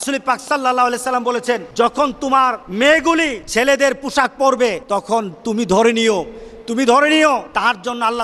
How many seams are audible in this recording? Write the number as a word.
five